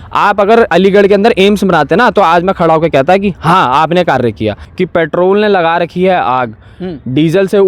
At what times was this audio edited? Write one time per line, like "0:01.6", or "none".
0:04.7